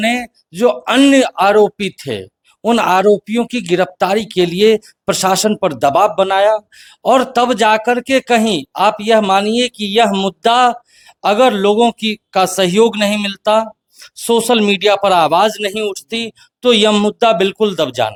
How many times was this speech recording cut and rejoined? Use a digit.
0